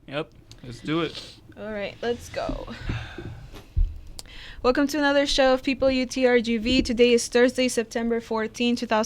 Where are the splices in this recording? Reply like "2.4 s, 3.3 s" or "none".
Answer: 0.9 s